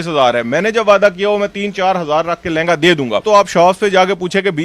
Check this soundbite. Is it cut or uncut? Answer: cut